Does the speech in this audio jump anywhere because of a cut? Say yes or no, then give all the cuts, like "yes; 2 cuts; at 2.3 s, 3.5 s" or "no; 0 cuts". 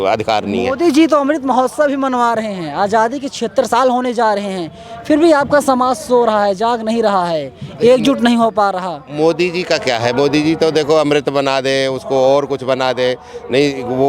no; 0 cuts